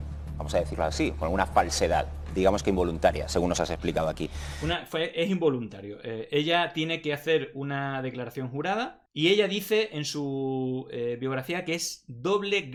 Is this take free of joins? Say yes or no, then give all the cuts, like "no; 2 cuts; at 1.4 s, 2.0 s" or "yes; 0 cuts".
yes; 0 cuts